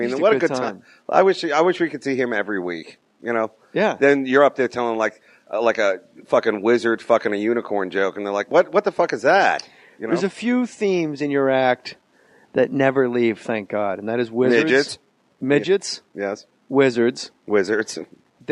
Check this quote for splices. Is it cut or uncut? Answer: uncut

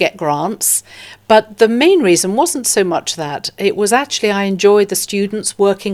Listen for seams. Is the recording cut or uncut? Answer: uncut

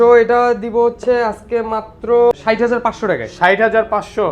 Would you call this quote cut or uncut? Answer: cut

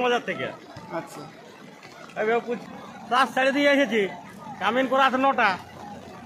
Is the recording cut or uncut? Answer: cut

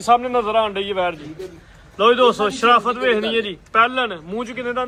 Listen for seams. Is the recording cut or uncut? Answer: uncut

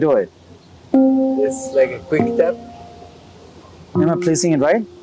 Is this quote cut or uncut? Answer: uncut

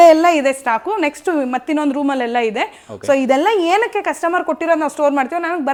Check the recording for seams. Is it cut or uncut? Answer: uncut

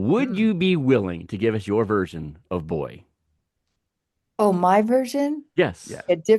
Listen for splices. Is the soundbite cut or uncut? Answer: uncut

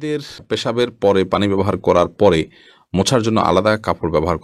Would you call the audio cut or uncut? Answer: uncut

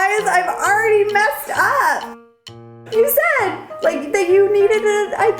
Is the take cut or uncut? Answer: cut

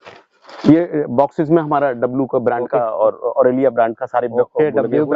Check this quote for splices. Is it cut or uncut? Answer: uncut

